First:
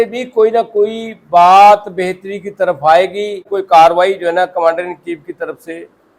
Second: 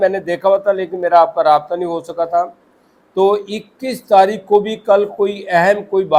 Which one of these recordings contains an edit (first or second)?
first